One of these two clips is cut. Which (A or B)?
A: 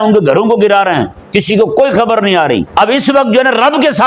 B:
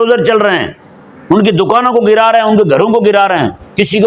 A